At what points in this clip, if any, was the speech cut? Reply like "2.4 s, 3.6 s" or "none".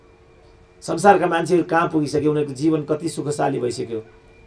none